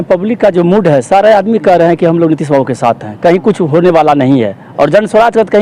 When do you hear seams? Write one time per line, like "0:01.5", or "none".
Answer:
none